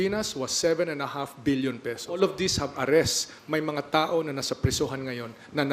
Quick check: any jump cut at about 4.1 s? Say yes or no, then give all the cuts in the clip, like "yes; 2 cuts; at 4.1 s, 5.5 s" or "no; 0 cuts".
no; 1 cut; at 2.2 s